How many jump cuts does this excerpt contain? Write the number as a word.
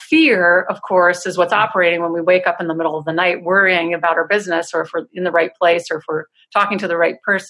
zero